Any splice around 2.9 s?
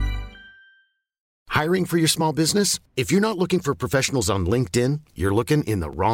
no; 1 cut; at 1.4 s

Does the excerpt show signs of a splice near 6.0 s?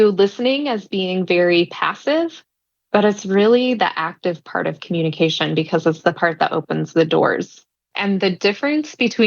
no; 1 cut; at 7.8 s

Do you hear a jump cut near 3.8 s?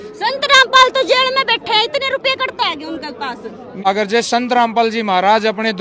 yes; 1 cut; at 3.8 s

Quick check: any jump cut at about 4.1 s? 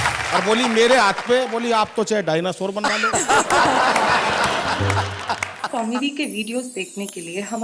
no; 1 cut; at 5.7 s

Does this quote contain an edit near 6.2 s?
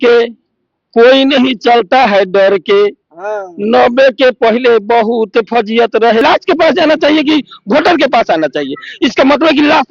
yes; 1 cut; at 6.2 s

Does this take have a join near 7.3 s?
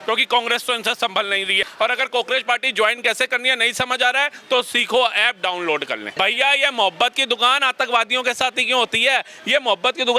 no; 2 cuts; at 1.7 s, 6.1 s

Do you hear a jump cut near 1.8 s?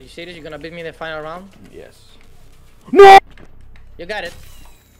no; 1 cut; at 3.2 s

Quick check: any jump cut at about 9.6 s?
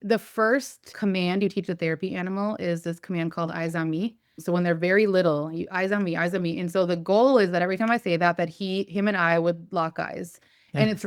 no; 2 cuts; at 0.9 s, 4.3 s

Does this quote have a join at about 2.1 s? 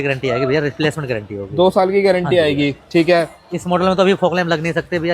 no; 0 cuts

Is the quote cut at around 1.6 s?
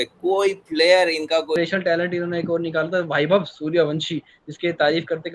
yes; 1 cut; at 1.6 s

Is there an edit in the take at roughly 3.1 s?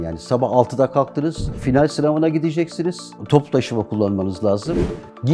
yes; 2 cuts; at 1.6 s, 3.1 s

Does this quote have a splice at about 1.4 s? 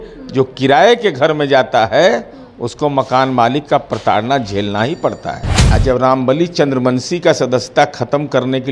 no; 1 cut; at 5.5 s

